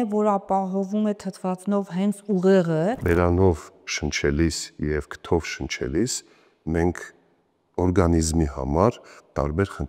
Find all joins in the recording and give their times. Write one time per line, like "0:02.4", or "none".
0:03.0

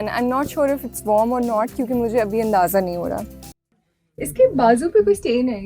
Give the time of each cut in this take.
0:03.9

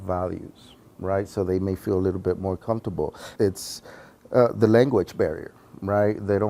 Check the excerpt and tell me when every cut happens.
0:03.2

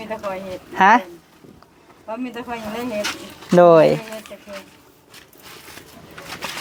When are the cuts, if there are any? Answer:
none

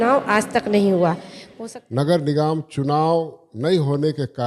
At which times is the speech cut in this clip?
0:01.3

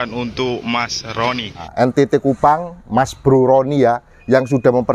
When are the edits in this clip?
0:01.7

